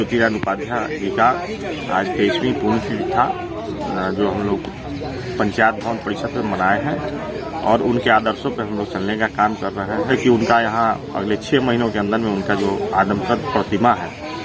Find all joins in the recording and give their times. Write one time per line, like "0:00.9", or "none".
0:10.1